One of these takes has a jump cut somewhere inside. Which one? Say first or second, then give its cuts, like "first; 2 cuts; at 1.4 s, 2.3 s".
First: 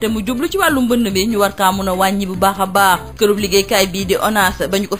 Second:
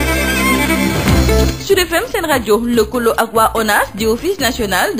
second; 1 cut; at 1.3 s